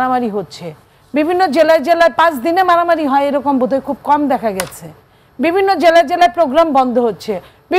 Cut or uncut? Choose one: uncut